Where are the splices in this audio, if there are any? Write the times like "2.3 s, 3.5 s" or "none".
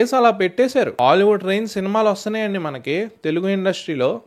0.9 s